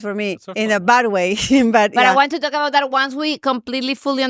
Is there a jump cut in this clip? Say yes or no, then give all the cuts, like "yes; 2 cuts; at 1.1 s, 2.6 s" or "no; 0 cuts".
no; 0 cuts